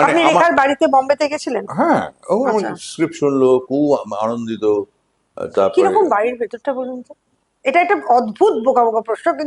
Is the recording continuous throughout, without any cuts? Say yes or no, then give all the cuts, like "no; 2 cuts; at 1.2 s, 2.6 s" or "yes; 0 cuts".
yes; 0 cuts